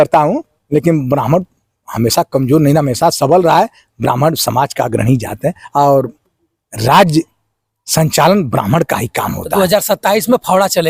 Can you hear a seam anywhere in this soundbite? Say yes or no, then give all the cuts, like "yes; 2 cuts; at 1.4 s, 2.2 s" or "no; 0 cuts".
no; 0 cuts